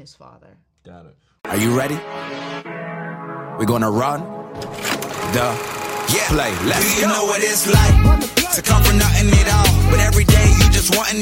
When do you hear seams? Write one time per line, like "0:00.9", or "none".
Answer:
0:01.2

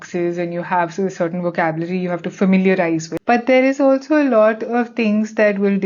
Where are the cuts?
0:03.1

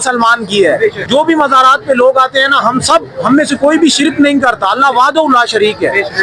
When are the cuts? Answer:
0:01.0

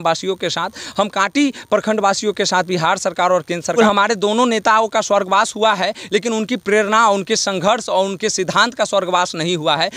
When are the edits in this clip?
0:03.7

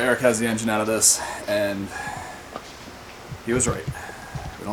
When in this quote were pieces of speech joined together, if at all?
none

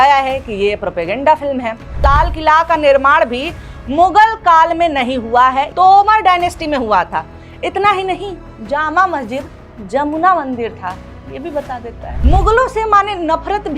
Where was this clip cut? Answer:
0:02.0
0:05.7
0:12.1

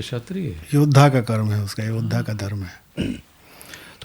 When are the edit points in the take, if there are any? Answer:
0:02.8

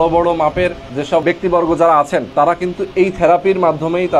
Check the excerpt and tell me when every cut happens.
0:01.1
0:02.3

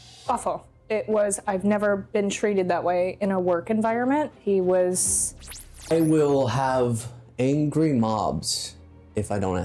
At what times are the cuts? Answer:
0:05.7

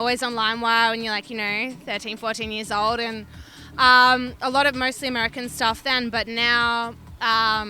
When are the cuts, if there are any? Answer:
none

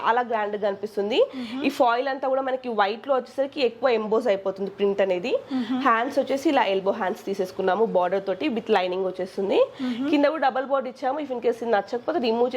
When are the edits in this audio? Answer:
none

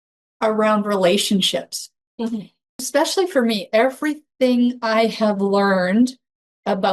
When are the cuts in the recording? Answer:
0:02.9

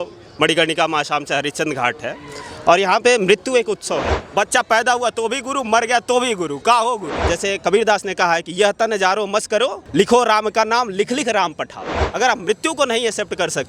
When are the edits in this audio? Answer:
0:04.0
0:07.2
0:12.0

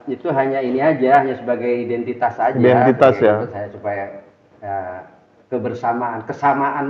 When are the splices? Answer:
none

